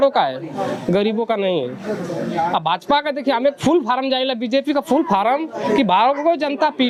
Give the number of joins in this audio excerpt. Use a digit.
0